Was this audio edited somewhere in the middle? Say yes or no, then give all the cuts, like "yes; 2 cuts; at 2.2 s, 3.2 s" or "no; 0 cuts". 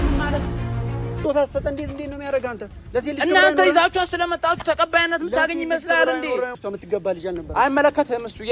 yes; 2 cuts; at 1.1 s, 6.6 s